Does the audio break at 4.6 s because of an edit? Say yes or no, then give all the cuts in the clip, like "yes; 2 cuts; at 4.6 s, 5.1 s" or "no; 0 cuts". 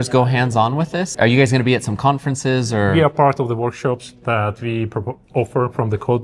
no; 2 cuts; at 1.1 s, 2.9 s